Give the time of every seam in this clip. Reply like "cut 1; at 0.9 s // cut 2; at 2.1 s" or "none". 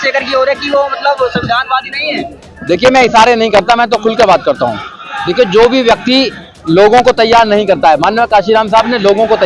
none

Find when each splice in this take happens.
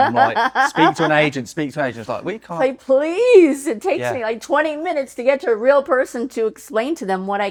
none

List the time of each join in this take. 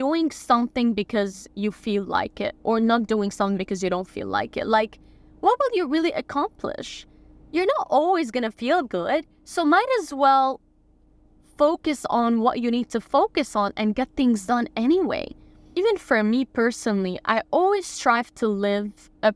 none

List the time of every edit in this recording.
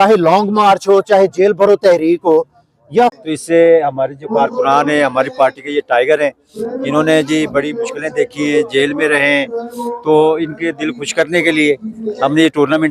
cut 1; at 3.1 s

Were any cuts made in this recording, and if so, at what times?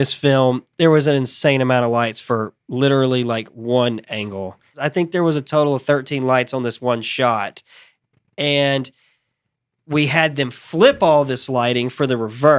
cut 1; at 4.8 s

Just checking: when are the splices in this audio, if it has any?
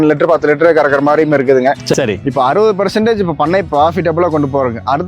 cut 1; at 1.9 s

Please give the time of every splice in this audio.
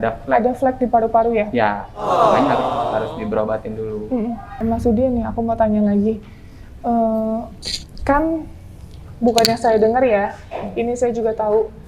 cut 1; at 4.6 s

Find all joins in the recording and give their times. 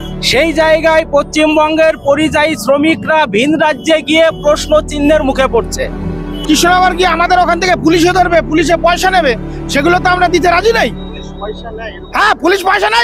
cut 1; at 6.2 s

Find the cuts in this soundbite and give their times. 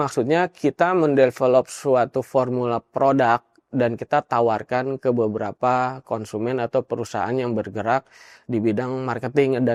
none

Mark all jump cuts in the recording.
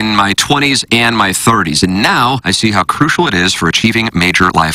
none

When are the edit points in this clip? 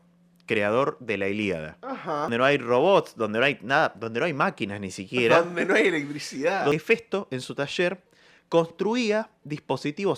cut 1; at 2.3 s // cut 2; at 6.7 s

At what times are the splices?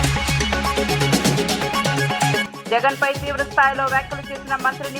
cut 1; at 1.1 s // cut 2; at 2.5 s

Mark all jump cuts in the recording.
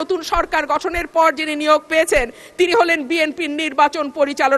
none

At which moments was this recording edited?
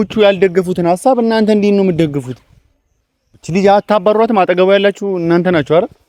none

